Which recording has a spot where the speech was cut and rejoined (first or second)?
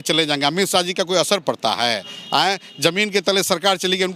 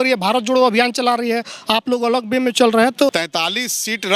second